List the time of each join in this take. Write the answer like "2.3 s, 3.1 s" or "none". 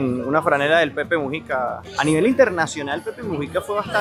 1.8 s